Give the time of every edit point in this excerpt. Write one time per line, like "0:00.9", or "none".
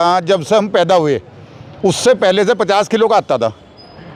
none